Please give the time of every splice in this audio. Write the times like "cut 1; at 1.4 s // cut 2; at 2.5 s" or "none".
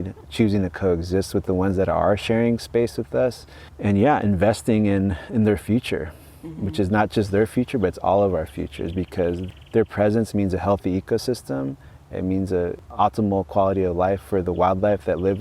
cut 1; at 9.4 s // cut 2; at 12.9 s